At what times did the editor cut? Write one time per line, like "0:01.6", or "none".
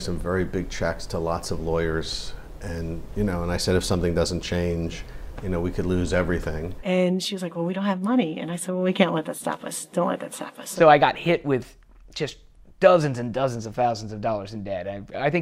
0:06.7
0:10.7

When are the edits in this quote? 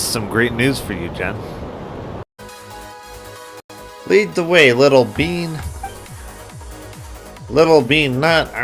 0:02.3
0:03.9

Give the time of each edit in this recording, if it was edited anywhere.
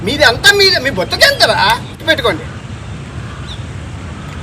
0:01.9

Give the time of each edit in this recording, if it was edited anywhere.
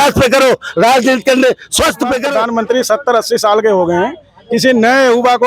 0:02.2

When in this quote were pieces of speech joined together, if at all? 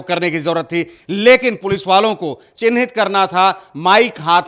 none

